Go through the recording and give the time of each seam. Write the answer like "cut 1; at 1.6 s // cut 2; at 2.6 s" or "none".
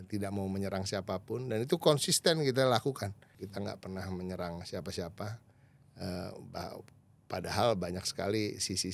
cut 1; at 3.3 s